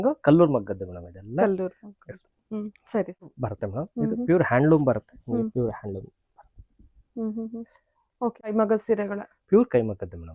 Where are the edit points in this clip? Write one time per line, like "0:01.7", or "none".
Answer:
0:03.4
0:08.5

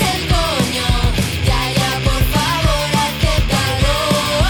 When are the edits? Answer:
none

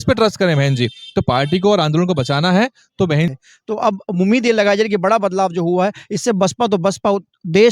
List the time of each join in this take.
0:03.3

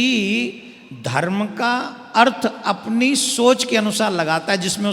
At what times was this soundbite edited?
none

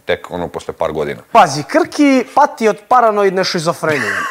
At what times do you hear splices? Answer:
0:01.3

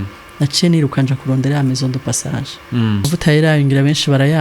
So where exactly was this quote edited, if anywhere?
0:03.1

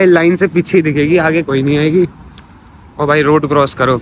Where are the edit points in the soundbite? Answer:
none

